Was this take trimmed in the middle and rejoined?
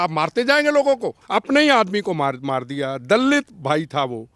yes; 1 cut; at 1.1 s

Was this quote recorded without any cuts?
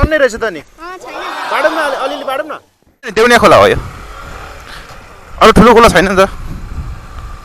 no; 1 cut; at 3.1 s

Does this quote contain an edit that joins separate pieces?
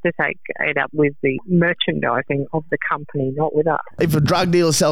yes; 2 cuts; at 1.4 s, 3.9 s

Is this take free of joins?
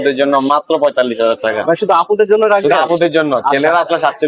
yes; 0 cuts

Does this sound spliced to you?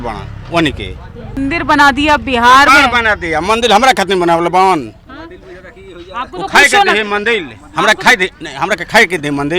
yes; 1 cut; at 1.4 s

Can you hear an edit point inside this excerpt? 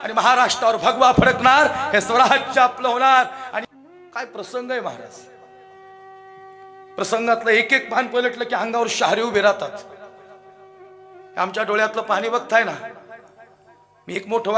yes; 1 cut; at 3.5 s

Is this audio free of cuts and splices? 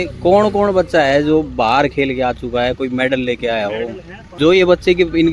no; 1 cut; at 4.3 s

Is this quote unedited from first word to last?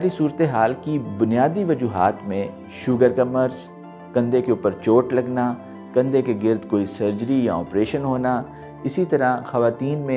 yes; 0 cuts

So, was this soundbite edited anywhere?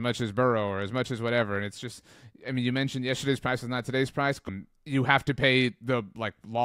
yes; 1 cut; at 4.5 s

